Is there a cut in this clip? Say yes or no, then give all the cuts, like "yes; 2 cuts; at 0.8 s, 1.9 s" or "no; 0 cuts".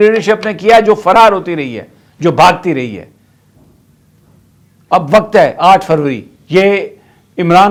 no; 0 cuts